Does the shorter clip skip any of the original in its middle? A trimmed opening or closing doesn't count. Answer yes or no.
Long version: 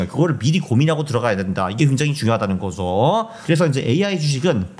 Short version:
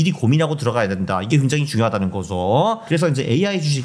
yes